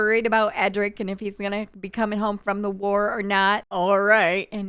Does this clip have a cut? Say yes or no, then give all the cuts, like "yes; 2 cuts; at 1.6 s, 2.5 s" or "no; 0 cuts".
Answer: yes; 1 cut; at 3.7 s